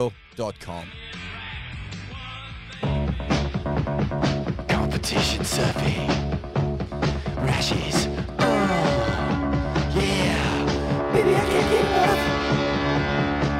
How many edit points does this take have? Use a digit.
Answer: 1